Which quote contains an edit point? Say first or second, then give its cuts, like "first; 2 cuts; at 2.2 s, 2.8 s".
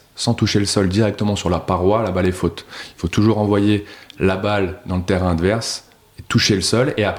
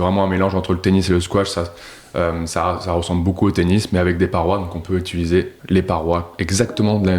second; 1 cut; at 5.6 s